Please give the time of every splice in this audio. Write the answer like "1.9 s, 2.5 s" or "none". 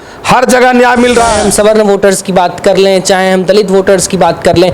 1.3 s